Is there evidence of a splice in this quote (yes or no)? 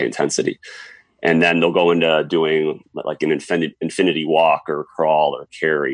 no